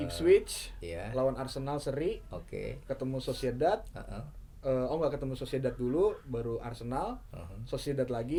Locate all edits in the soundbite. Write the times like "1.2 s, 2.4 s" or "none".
none